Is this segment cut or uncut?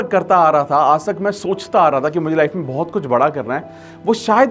uncut